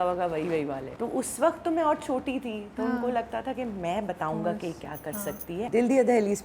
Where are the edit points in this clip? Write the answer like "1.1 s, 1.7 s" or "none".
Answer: 0.9 s, 5.6 s